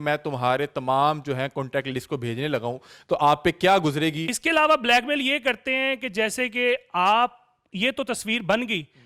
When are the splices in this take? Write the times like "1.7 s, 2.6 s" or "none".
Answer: 4.3 s